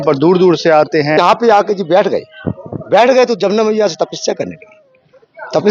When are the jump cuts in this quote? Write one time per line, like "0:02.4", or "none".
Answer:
0:01.2